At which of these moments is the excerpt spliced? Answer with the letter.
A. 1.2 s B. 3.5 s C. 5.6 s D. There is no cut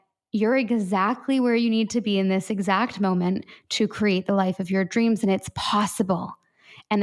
D